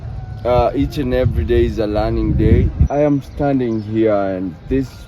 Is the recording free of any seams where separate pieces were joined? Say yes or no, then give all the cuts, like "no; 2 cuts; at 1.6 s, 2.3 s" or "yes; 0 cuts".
no; 1 cut; at 2.9 s